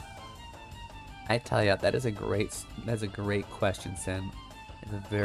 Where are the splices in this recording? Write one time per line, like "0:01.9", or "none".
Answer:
none